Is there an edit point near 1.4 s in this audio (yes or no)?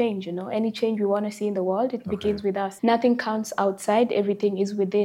no